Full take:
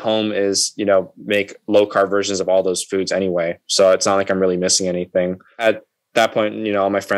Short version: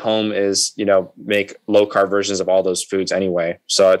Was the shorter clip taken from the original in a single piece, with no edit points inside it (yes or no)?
yes